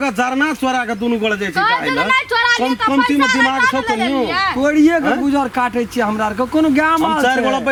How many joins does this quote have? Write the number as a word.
zero